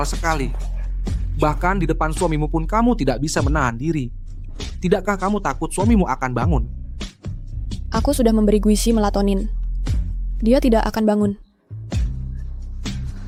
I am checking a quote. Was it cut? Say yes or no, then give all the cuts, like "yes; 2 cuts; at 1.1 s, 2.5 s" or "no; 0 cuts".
no; 0 cuts